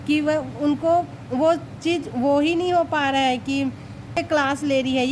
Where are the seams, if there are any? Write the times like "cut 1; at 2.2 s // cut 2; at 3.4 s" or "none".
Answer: cut 1; at 4.2 s